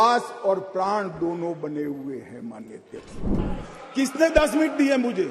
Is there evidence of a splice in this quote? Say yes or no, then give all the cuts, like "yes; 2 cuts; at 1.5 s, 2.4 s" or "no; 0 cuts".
yes; 1 cut; at 3.3 s